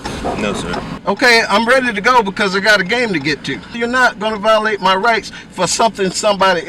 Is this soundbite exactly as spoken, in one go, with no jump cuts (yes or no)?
no